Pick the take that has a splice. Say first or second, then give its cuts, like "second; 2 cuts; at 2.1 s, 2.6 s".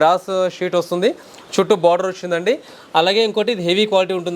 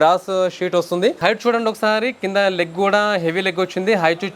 second; 1 cut; at 1.2 s